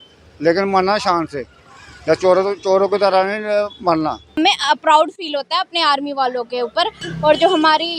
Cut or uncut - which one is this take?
cut